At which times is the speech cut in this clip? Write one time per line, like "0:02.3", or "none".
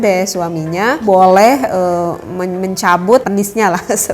0:01.0
0:03.2